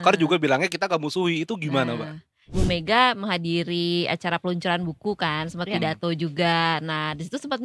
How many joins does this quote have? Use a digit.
1